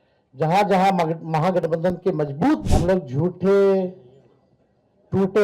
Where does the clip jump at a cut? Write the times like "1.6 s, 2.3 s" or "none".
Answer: 2.6 s